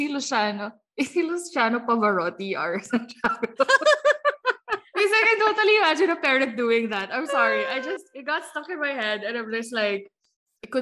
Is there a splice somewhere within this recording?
no; 0 cuts

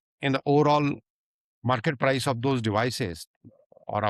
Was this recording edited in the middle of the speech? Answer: no; 0 cuts

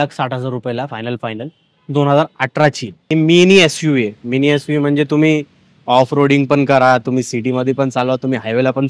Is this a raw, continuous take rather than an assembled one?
no; 1 cut; at 3.1 s

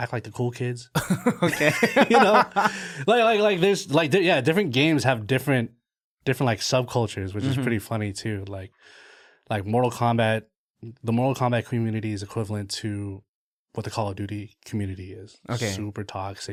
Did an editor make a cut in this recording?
no; 0 cuts

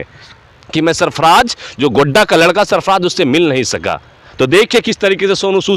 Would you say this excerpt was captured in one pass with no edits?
yes; 0 cuts

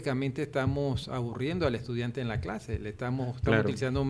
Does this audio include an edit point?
no; 0 cuts

